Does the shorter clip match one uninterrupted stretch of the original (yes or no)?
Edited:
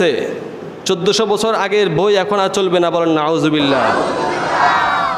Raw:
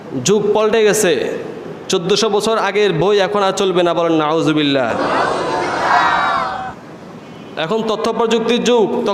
no